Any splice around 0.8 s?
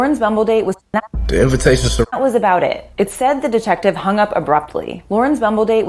yes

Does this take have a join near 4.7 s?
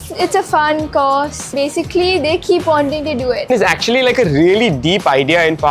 no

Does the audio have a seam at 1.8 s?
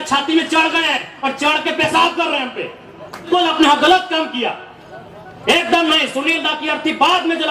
no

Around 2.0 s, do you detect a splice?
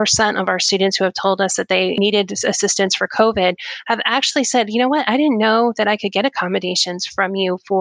yes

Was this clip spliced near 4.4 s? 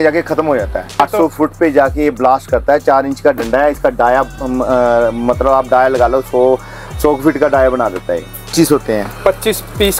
no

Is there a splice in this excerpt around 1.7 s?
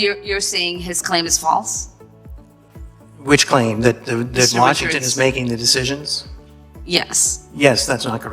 yes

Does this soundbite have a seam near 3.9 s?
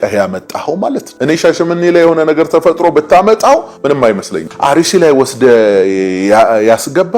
yes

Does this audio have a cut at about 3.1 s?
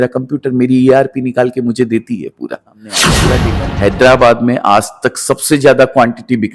yes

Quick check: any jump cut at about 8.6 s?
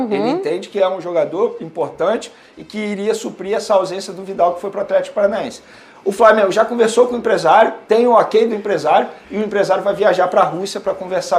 no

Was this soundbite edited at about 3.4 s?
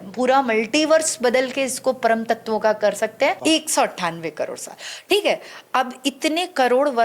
yes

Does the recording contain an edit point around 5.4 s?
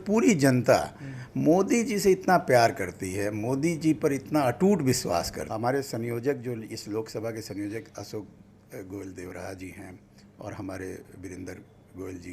yes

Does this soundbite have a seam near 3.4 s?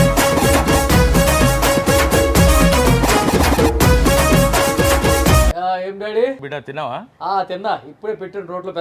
no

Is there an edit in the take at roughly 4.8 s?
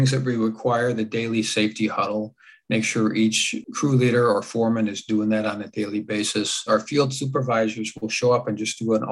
no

